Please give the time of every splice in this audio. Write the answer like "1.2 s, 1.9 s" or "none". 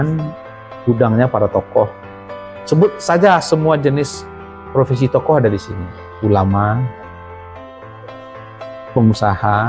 none